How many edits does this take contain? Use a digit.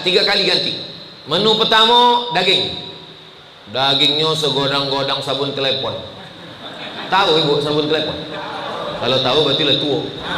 0